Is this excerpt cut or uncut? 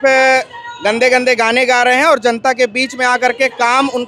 uncut